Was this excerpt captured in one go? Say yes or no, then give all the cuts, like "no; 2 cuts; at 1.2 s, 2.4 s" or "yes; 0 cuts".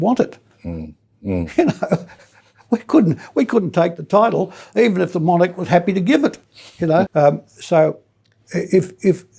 no; 1 cut; at 7.1 s